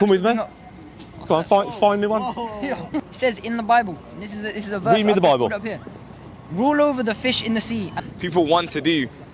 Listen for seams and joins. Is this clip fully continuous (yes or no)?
no